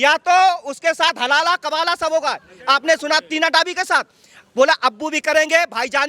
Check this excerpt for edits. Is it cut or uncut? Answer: uncut